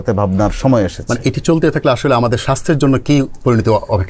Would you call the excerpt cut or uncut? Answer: uncut